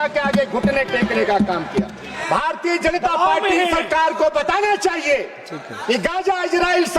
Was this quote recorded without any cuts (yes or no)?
no